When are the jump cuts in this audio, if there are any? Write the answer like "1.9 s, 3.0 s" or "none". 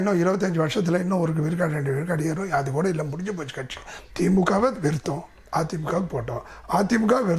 3.9 s